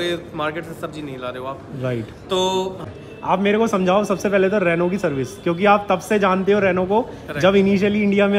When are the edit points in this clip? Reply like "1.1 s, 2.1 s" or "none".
2.8 s